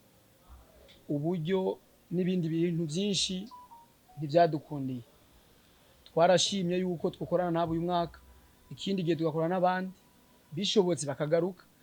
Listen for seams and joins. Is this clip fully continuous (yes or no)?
yes